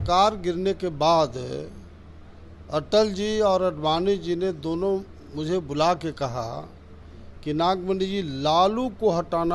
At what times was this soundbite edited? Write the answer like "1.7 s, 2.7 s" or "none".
none